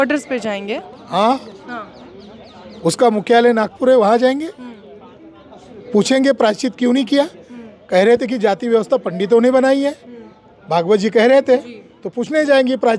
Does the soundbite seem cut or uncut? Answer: uncut